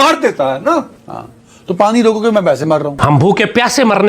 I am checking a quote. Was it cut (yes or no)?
yes